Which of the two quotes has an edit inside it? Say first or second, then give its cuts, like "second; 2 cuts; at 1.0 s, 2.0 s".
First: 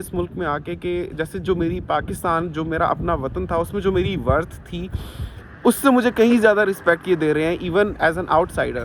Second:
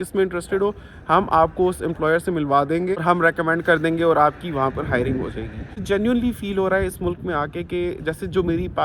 second; 2 cuts; at 3.0 s, 5.8 s